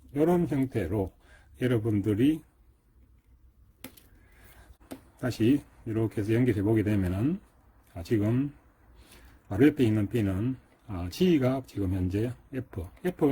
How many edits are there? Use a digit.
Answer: 1